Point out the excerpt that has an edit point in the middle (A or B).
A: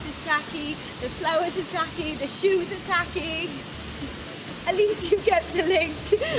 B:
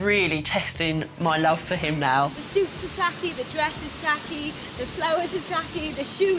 B